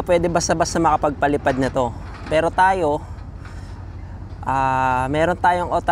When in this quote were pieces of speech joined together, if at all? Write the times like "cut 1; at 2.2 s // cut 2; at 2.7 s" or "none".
none